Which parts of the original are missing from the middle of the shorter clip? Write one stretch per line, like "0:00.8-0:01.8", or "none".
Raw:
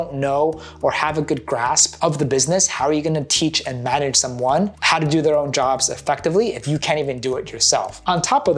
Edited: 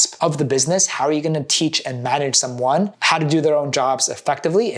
none